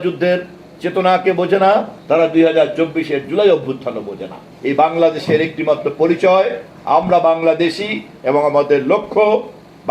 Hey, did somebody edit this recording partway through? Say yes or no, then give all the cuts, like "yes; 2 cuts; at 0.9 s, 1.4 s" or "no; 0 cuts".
yes; 2 cuts; at 1.9 s, 4.4 s